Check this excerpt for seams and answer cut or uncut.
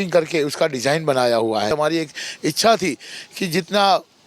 cut